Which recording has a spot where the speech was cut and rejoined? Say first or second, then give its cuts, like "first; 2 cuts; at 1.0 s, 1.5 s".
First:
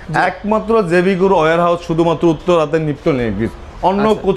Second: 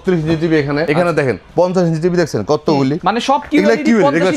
second; 2 cuts; at 0.8 s, 3.0 s